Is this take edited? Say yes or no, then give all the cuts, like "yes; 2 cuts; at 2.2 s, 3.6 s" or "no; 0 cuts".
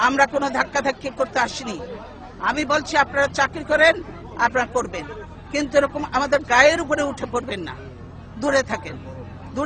no; 0 cuts